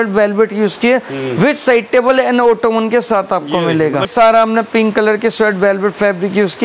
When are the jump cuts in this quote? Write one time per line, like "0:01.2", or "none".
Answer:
0:04.1

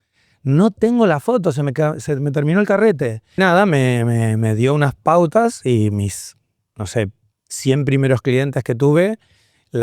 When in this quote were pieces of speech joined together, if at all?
0:03.4

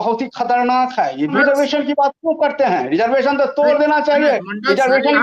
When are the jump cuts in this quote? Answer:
0:01.3

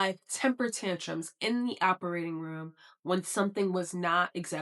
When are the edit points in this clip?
none

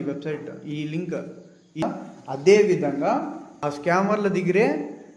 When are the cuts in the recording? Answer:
0:01.8

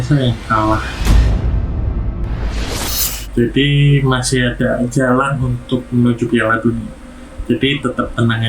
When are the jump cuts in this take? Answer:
0:01.0
0:03.2

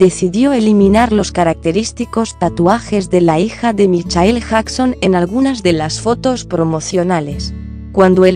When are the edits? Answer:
0:06.4

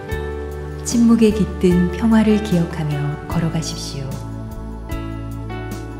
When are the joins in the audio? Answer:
none

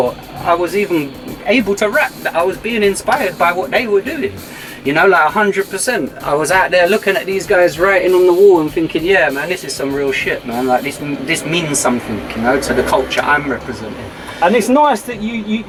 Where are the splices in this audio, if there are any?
none

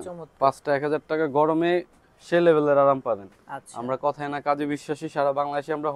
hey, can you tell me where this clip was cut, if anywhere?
none

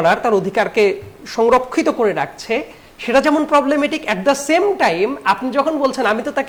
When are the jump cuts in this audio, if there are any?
none

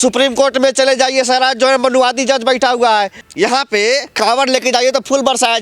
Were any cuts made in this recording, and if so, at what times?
0:03.2

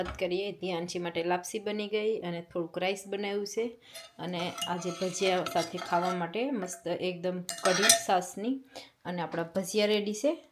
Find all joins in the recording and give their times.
none

